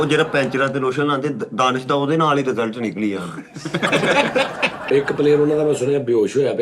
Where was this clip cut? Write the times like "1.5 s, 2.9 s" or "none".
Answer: 4.8 s